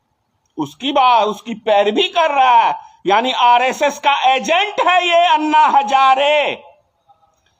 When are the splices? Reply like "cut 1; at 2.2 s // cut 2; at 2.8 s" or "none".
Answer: none